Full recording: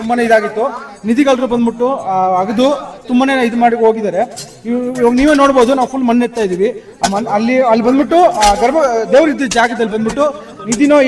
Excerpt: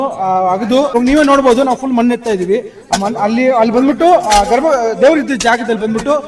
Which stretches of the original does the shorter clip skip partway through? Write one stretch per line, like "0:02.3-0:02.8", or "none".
0:02.8-0:05.1